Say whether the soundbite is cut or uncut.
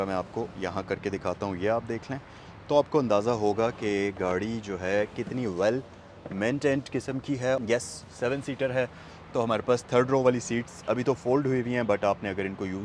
uncut